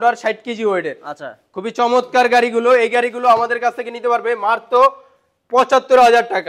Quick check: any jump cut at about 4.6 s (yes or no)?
no